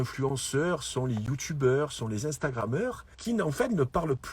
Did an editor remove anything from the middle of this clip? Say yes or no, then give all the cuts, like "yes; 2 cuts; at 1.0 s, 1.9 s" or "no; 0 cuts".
yes; 1 cut; at 3.1 s